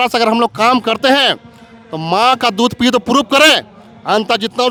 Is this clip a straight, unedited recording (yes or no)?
yes